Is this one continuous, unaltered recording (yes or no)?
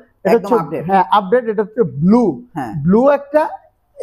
yes